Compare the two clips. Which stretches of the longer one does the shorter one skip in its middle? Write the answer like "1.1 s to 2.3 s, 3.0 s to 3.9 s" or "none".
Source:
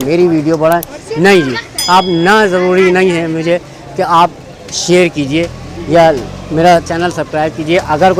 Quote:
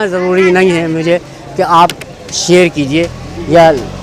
none